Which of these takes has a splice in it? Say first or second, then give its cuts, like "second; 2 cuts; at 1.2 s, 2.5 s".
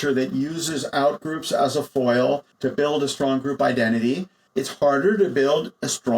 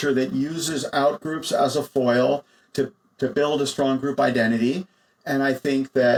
first; 2 cuts; at 2.5 s, 4.4 s